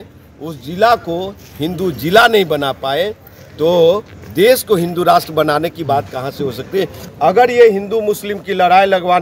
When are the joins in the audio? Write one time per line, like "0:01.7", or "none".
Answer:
0:07.0